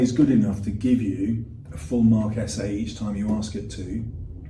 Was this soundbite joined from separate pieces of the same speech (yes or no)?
no